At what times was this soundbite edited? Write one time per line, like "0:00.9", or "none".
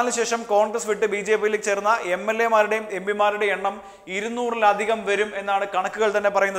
none

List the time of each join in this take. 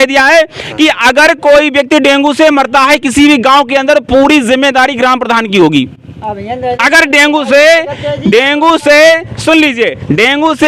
none

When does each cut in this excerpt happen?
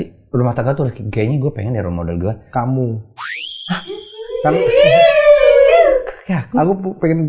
none

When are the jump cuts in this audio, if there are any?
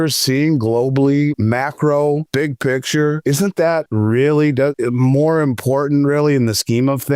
0:01.4
0:02.3
0:03.5
0:04.8

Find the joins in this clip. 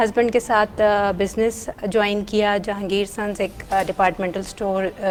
none

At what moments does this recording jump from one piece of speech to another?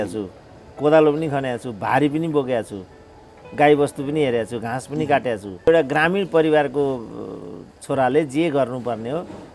0:05.7

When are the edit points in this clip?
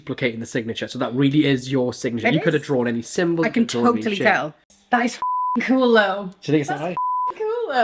0:04.8

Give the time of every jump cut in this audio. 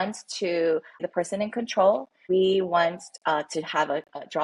0:01.1
0:02.1

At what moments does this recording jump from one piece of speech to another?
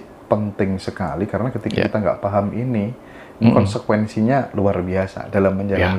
none

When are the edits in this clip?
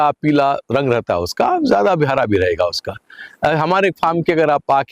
none

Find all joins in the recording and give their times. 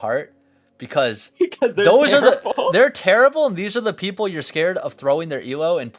0:01.2

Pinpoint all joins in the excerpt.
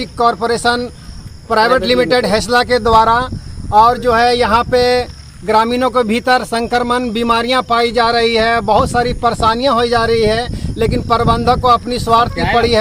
none

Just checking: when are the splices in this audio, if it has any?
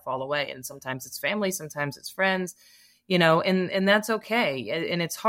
none

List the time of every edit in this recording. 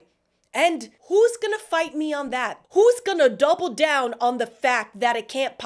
0:00.9
0:02.5

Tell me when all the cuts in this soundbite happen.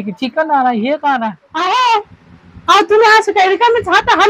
0:01.4

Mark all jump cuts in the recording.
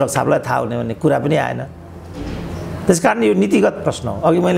none

